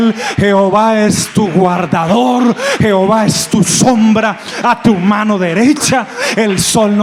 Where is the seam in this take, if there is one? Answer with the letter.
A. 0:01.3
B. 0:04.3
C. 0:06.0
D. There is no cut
D